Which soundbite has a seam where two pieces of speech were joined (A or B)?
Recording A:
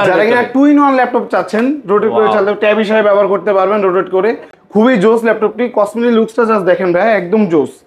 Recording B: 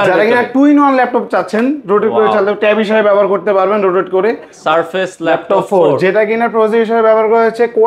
B